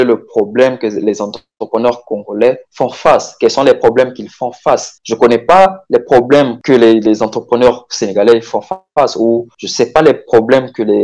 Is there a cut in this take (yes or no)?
no